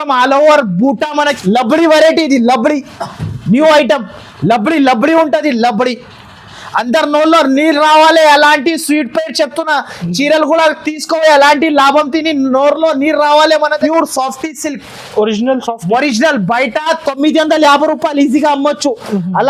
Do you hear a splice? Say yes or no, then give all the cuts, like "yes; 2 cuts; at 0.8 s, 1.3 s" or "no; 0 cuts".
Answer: yes; 2 cuts; at 1.3 s, 13.8 s